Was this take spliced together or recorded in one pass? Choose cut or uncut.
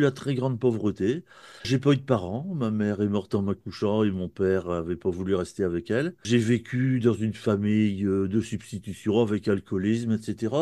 cut